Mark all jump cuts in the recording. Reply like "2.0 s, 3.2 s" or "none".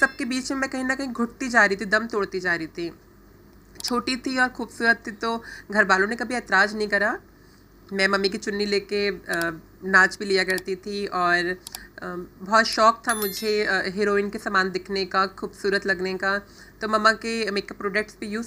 none